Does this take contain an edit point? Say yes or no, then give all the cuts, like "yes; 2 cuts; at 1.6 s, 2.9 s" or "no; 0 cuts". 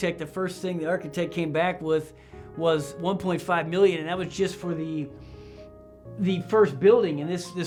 no; 0 cuts